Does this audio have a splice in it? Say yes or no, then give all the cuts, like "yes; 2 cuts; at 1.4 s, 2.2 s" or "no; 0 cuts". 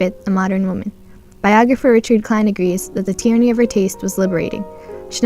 yes; 1 cut; at 3.3 s